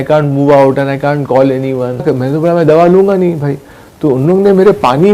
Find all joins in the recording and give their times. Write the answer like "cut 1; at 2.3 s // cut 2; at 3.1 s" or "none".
cut 1; at 2.0 s